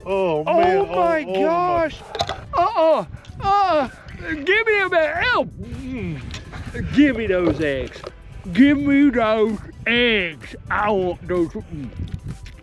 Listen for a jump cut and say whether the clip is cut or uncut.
uncut